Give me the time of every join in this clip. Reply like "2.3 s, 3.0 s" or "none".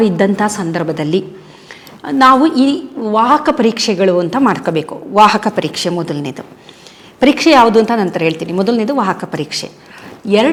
none